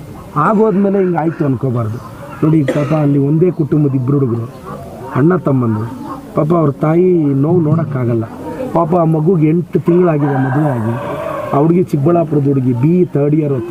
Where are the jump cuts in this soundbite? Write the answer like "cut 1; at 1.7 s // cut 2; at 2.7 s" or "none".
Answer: none